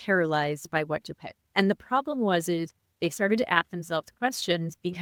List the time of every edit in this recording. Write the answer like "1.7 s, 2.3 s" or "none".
none